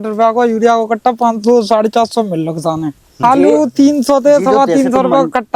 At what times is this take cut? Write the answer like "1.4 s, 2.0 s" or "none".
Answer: 3.1 s